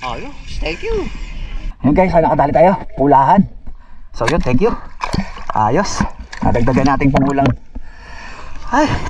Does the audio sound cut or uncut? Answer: cut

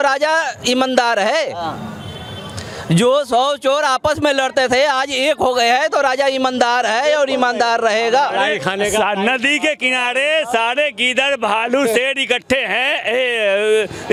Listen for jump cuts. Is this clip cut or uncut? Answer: uncut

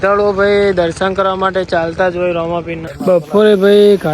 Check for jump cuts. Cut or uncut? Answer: cut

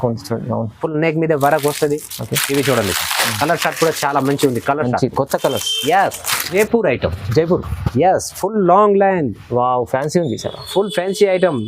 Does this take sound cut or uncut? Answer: cut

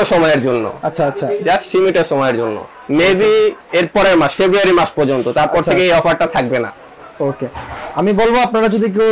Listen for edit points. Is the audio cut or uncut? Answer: uncut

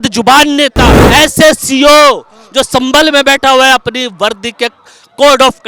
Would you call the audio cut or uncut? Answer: cut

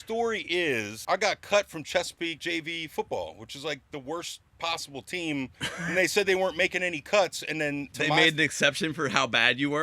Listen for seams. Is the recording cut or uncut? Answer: cut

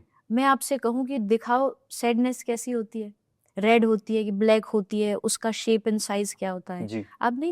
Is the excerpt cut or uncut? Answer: uncut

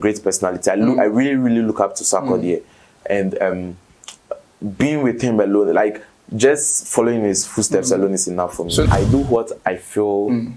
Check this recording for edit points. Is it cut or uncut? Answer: cut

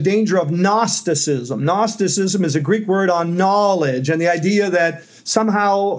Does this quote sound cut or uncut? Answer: uncut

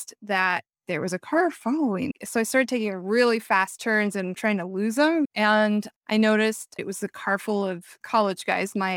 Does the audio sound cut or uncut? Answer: cut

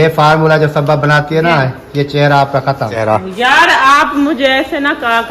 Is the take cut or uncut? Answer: cut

